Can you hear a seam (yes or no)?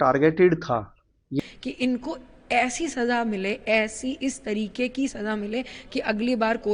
yes